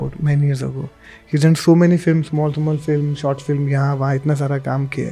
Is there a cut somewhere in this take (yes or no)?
no